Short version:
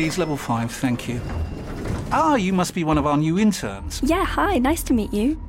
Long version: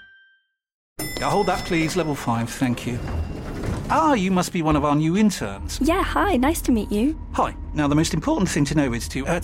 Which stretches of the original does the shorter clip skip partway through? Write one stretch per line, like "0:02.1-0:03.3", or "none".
none